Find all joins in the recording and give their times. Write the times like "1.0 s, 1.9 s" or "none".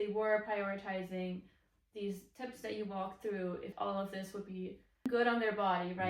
3.7 s

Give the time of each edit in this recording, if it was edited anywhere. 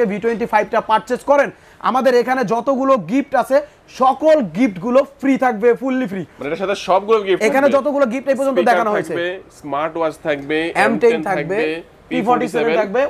none

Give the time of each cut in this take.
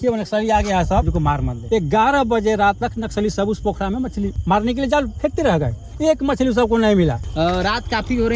1.6 s, 4.4 s, 7.3 s

